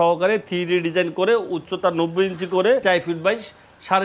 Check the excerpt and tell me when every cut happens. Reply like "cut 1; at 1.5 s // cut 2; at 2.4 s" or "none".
cut 1; at 2.8 s